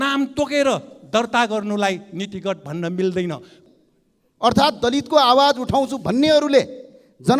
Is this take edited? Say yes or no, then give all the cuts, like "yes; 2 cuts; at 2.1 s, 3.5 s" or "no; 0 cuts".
yes; 1 cut; at 3.6 s